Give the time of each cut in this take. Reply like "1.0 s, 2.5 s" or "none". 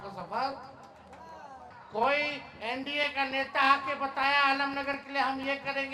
1.7 s